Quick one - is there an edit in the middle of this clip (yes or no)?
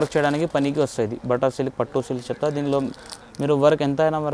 no